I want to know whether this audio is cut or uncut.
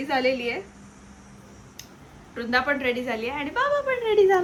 uncut